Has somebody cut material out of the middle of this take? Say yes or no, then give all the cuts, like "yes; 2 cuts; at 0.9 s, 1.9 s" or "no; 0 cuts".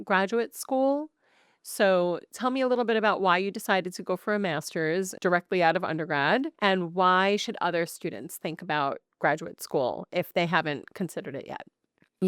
yes; 2 cuts; at 5.1 s, 6.5 s